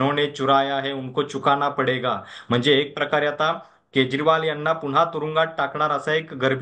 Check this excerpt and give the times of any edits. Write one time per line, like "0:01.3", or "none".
none